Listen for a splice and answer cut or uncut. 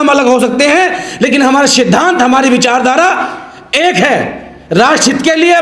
uncut